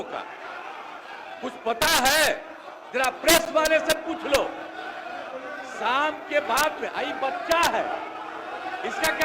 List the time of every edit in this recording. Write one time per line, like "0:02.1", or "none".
none